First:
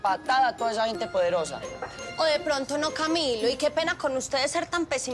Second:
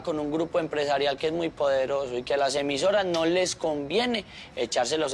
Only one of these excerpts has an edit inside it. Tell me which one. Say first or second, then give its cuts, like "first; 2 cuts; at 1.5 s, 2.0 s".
first; 1 cut; at 2.0 s